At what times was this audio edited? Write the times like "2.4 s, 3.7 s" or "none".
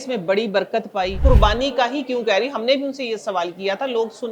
1.2 s